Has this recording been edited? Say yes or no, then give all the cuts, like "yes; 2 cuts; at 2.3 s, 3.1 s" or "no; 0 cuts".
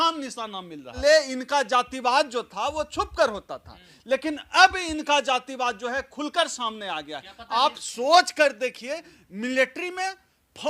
yes; 1 cut; at 1.0 s